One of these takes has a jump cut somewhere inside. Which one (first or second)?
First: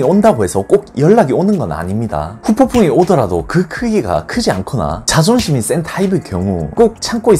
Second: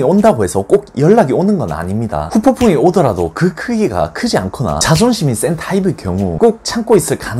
second